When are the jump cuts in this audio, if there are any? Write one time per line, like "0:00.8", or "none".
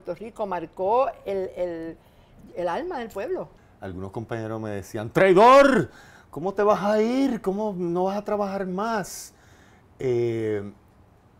0:03.6

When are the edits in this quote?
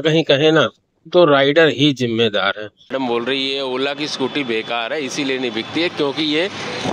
0:02.9

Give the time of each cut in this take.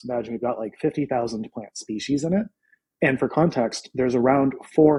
none

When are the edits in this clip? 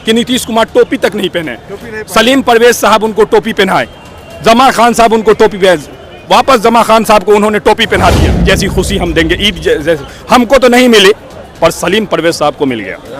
0:08.3

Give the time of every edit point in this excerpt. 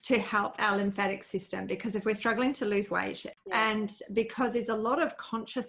0:03.2

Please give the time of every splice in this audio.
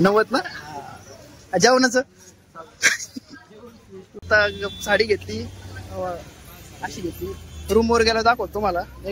0:04.2

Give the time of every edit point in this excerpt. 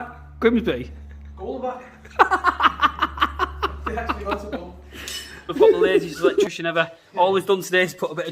0:06.4

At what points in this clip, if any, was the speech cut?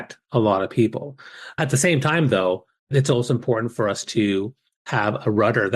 0:01.5
0:02.9

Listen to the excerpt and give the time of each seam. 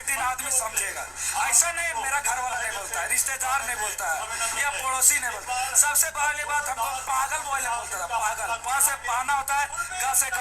none

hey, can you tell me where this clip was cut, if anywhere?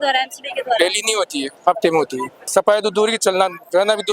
0:02.4

